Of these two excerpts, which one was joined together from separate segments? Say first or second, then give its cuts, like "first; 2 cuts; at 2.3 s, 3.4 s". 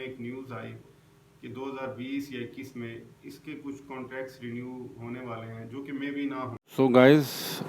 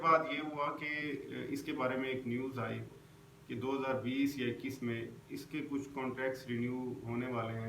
first; 1 cut; at 6.6 s